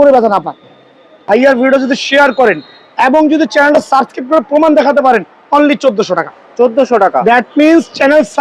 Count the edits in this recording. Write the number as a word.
one